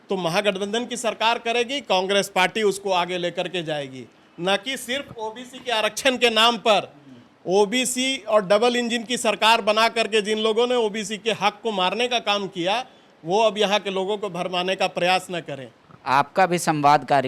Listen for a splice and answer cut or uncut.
uncut